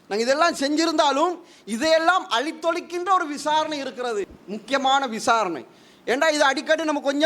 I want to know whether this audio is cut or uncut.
cut